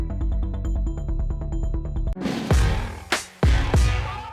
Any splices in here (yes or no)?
yes